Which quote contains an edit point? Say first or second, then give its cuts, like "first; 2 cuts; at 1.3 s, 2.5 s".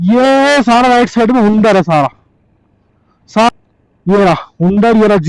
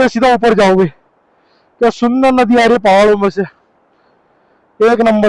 first; 1 cut; at 3.5 s